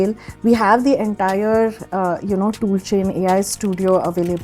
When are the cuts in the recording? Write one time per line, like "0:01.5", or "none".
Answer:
none